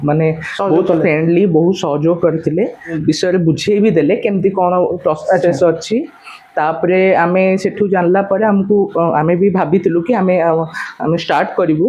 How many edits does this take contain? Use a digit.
1